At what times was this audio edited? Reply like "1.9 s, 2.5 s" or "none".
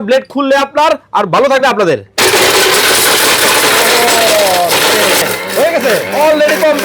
5.2 s